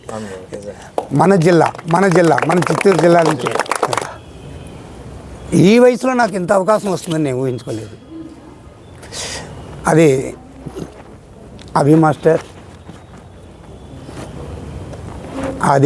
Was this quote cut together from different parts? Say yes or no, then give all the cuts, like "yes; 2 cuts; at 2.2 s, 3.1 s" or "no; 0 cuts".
yes; 1 cut; at 4.1 s